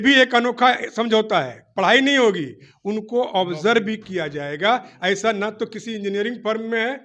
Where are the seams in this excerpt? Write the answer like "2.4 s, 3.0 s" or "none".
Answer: none

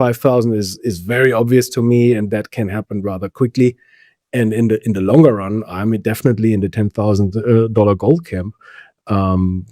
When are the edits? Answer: none

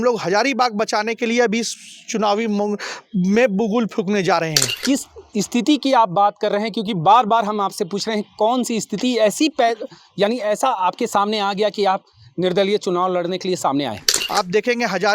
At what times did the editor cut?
4.8 s, 14.2 s

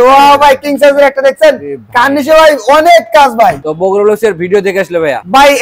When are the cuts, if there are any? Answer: 3.7 s

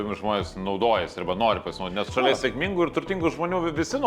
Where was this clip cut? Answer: none

